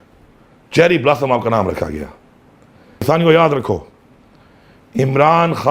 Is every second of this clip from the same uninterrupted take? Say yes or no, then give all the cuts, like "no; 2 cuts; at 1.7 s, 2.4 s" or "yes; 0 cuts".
no; 1 cut; at 3.0 s